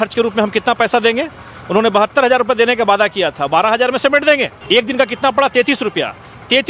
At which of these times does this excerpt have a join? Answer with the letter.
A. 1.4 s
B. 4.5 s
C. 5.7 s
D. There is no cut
B